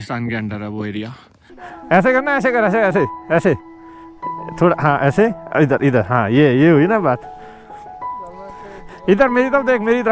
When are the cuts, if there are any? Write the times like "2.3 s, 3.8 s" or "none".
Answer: 1.7 s